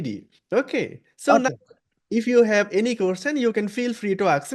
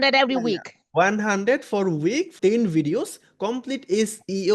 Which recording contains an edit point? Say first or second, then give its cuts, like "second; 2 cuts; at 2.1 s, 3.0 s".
second; 1 cut; at 2.3 s